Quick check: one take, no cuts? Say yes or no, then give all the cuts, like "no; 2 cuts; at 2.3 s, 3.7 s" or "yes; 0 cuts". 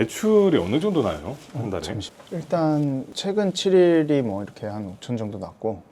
no; 1 cut; at 2.0 s